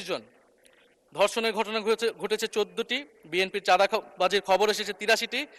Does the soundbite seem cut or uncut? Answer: uncut